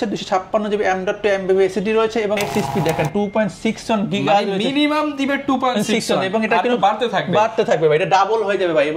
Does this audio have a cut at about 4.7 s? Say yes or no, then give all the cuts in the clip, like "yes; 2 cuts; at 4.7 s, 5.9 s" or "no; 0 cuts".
no; 1 cut; at 2.5 s